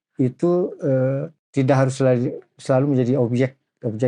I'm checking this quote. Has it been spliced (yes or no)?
yes